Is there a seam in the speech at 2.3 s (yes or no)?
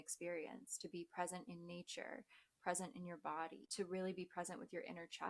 no